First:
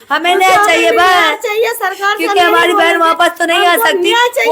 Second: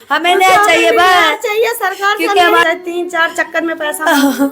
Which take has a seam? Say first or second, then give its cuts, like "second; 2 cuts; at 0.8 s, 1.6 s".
second; 1 cut; at 2.6 s